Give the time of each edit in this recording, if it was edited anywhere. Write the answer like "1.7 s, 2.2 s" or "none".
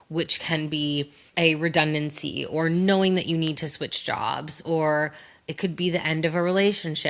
1.2 s